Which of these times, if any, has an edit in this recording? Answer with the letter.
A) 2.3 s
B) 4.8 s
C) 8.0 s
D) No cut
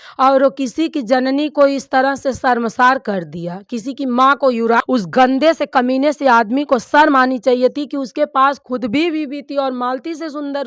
B